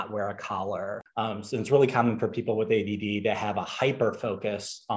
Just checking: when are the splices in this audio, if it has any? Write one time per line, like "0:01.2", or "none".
0:01.0